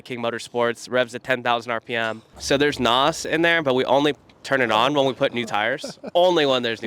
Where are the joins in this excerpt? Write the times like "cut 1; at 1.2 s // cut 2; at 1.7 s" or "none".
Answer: cut 1; at 2.2 s

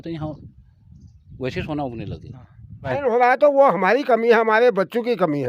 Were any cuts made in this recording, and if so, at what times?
cut 1; at 3.0 s

